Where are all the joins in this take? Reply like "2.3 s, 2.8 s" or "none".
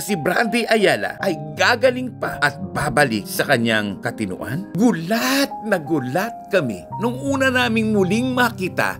4.6 s